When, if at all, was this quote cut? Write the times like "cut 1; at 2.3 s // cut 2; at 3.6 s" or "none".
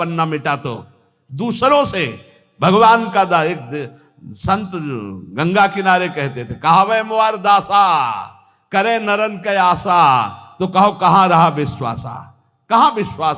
none